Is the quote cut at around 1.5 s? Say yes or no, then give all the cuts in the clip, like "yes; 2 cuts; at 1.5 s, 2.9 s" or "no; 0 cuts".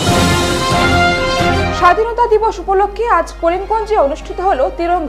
yes; 1 cut; at 1.5 s